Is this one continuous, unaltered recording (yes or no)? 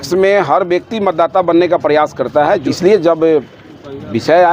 no